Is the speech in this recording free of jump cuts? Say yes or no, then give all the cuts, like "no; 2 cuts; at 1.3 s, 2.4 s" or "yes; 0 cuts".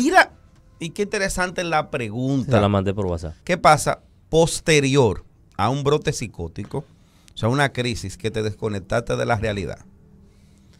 no; 1 cut; at 3.3 s